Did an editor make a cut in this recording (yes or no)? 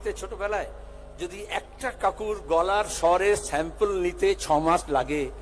no